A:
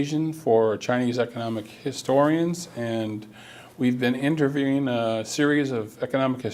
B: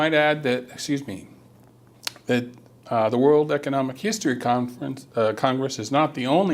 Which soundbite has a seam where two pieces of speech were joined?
B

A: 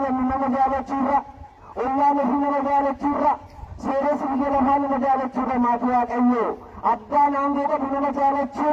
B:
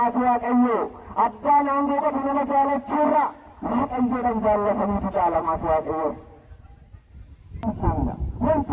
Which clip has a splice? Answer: B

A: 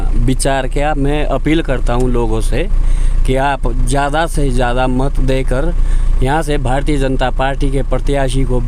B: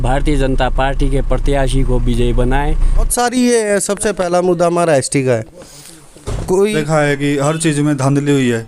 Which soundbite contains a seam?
B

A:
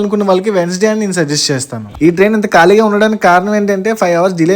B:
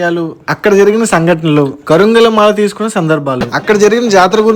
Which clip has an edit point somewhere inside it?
A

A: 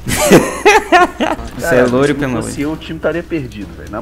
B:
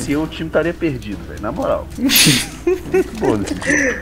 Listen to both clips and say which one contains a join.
A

